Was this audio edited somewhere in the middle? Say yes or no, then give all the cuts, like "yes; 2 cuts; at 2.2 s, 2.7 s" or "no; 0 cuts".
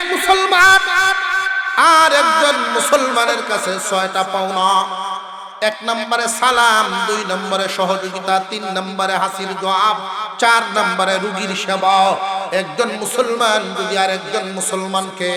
no; 0 cuts